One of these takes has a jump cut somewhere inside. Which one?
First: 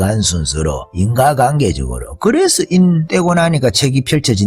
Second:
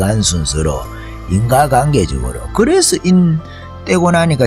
first; 2 cuts; at 0.9 s, 3.0 s

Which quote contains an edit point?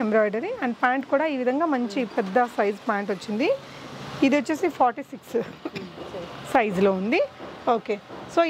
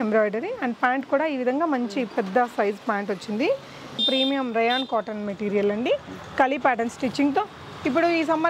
second; 1 cut; at 4.0 s

